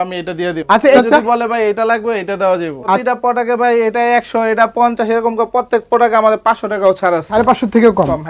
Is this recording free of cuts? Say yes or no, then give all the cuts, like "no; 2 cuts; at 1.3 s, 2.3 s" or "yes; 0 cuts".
no; 3 cuts; at 1.0 s, 3.0 s, 7.4 s